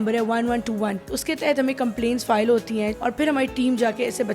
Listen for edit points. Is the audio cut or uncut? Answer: cut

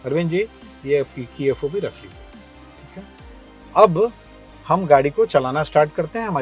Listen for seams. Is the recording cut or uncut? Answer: uncut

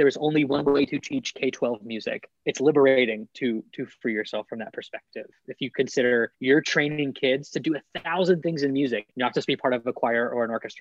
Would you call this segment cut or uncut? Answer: cut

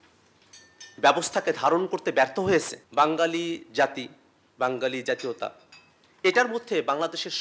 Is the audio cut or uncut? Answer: cut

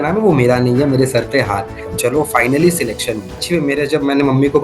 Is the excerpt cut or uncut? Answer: cut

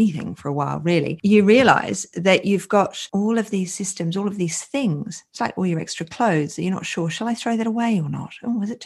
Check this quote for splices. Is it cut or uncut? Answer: uncut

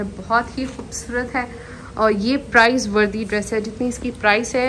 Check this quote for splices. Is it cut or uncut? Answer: uncut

